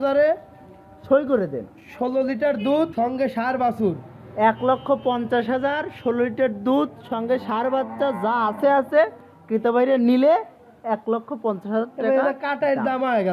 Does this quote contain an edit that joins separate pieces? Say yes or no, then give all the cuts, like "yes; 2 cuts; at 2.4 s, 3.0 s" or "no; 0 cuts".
yes; 1 cut; at 2.9 s